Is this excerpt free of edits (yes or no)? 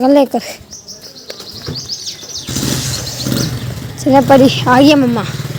yes